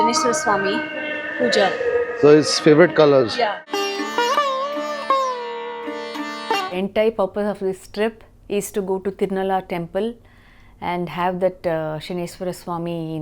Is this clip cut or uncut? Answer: cut